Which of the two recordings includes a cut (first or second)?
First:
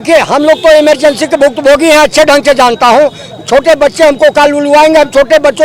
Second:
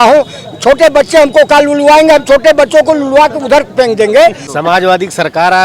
second